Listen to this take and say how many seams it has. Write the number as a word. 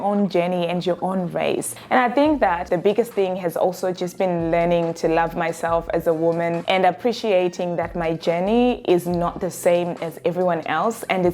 two